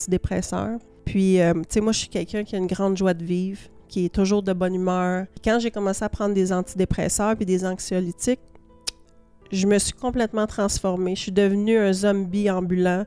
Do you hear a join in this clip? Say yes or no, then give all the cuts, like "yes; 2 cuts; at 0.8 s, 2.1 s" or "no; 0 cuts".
yes; 2 cuts; at 0.9 s, 5.3 s